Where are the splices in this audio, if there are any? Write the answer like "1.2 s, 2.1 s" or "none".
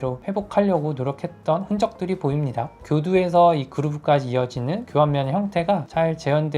2.8 s